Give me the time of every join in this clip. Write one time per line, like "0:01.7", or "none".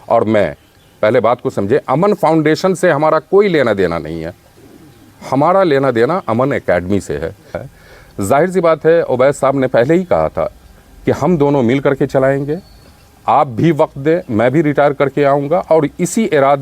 0:07.7